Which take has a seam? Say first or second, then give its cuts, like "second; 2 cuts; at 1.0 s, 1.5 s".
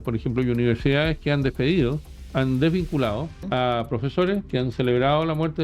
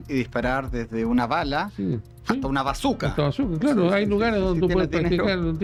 first; 1 cut; at 3.3 s